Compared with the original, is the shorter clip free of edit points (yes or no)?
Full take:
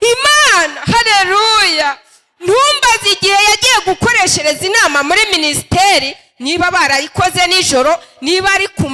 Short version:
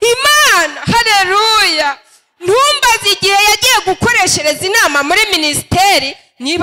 yes